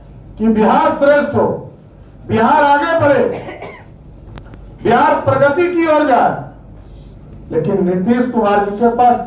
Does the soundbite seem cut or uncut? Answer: uncut